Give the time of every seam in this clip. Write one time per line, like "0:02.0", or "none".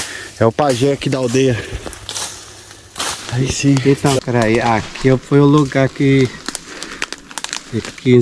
0:03.8